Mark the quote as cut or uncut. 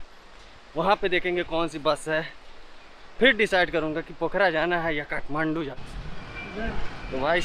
cut